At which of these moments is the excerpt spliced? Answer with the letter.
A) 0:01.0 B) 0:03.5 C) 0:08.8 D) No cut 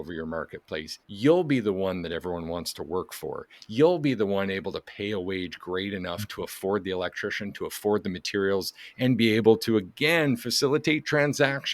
A